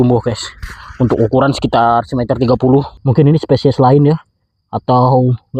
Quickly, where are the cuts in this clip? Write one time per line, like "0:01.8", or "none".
0:02.9